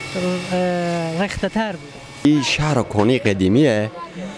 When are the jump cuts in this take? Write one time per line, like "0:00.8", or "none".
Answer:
0:02.2